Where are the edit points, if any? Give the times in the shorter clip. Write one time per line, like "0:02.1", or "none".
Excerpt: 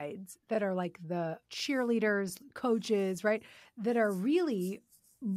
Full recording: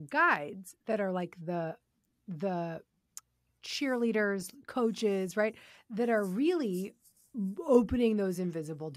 0:01.5